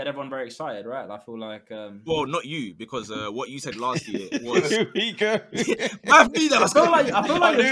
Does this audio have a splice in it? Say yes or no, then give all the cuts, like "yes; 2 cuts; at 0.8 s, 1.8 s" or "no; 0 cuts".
no; 0 cuts